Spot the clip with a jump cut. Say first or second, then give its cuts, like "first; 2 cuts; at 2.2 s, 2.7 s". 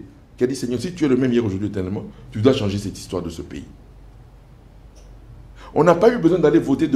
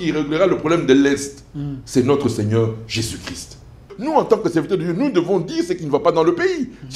second; 1 cut; at 3.9 s